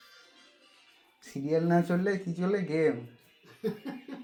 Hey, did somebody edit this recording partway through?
no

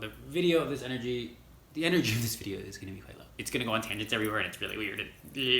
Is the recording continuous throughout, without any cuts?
no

